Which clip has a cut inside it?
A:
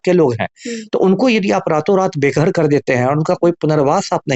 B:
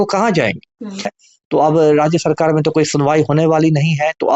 B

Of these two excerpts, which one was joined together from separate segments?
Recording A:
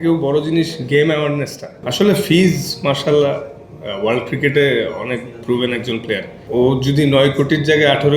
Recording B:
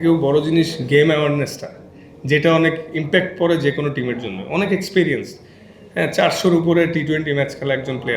A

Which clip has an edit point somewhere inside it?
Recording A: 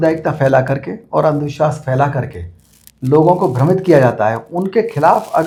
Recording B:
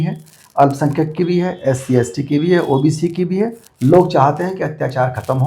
B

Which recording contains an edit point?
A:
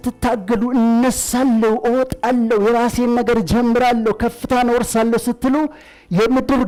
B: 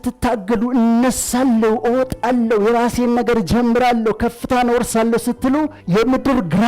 B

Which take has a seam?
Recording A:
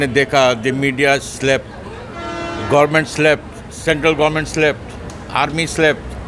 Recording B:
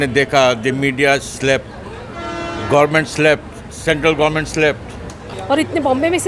B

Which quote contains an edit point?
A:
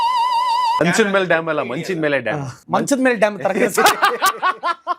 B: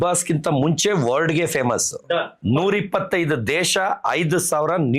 A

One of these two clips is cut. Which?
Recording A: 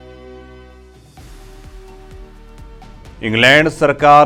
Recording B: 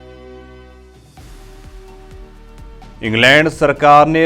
B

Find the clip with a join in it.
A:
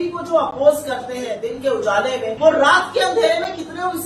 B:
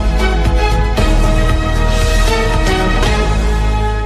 A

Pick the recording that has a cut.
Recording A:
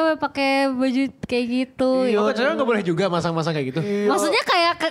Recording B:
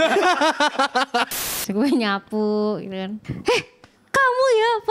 B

